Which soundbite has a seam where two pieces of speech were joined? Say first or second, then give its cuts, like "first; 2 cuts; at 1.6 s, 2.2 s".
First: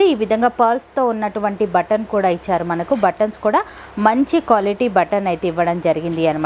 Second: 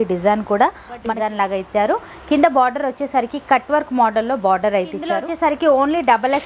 second; 2 cuts; at 1.0 s, 5.3 s